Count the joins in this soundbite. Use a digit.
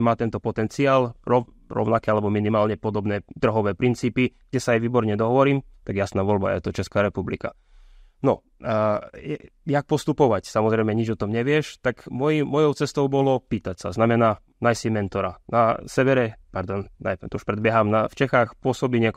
0